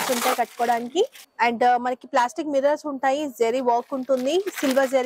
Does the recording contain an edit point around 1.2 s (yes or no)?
yes